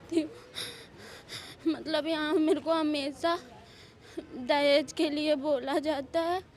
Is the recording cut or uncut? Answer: uncut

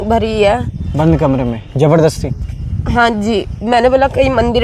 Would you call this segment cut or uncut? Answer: uncut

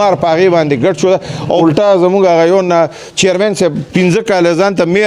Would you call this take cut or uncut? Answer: cut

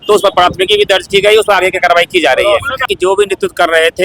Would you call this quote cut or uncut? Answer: cut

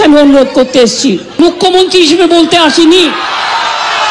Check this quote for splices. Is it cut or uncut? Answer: cut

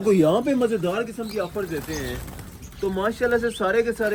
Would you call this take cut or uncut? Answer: uncut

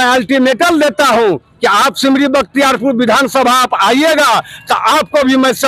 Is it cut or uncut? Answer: uncut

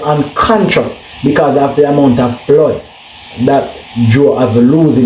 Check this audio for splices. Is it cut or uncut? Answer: uncut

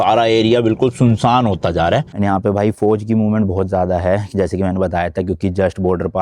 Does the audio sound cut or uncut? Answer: cut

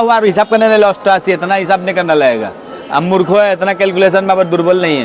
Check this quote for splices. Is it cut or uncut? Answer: uncut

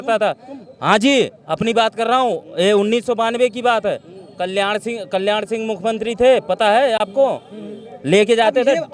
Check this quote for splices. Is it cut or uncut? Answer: uncut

